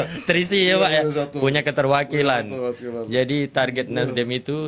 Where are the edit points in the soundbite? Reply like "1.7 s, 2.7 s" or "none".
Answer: none